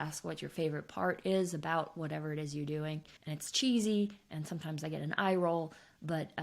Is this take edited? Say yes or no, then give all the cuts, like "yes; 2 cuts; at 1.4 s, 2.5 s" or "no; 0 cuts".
yes; 1 cut; at 3.2 s